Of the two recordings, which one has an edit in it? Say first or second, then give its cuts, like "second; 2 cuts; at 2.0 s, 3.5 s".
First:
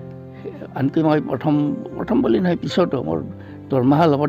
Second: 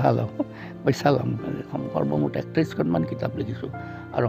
second; 1 cut; at 1.7 s